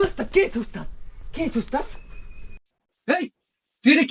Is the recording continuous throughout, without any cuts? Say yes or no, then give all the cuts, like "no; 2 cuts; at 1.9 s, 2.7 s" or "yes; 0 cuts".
yes; 0 cuts